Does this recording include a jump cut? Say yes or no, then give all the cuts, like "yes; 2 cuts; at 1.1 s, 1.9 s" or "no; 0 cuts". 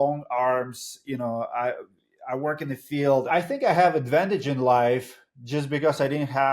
yes; 1 cut; at 3.3 s